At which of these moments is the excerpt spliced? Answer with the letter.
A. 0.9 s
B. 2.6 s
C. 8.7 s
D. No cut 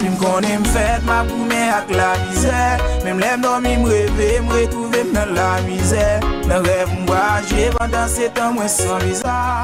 D